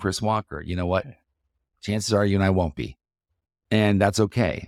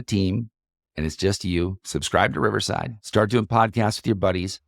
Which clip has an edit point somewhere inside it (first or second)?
second